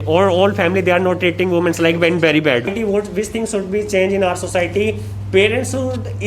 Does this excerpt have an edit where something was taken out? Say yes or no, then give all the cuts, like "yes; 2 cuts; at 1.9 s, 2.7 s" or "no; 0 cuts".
yes; 1 cut; at 2.7 s